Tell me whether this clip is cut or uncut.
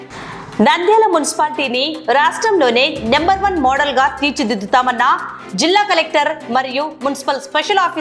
uncut